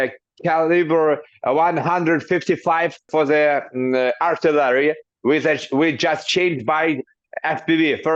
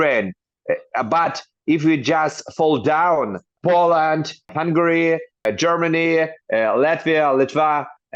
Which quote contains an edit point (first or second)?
second